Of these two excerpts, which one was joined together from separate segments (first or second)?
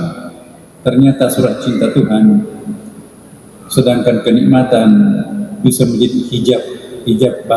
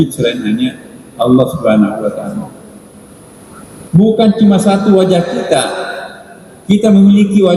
second